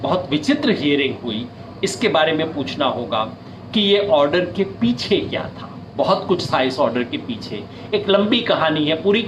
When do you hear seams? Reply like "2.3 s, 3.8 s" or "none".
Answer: none